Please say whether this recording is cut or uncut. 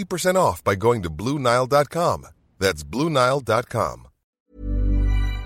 cut